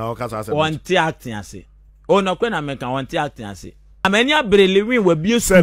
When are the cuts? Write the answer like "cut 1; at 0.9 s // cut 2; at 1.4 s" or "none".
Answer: cut 1; at 4.1 s